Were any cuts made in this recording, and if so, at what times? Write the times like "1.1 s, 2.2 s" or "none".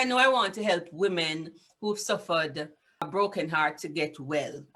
3.0 s